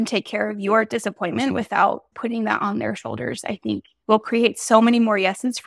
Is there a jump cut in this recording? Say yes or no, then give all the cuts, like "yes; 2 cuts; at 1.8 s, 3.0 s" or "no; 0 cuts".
yes; 1 cut; at 2.1 s